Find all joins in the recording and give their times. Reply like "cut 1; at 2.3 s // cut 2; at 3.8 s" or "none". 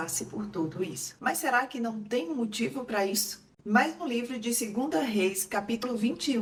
none